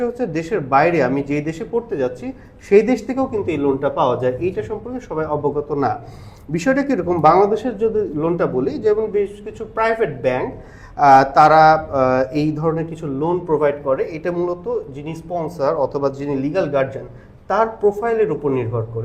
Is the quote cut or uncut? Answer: uncut